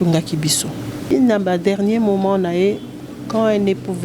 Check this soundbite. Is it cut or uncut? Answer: cut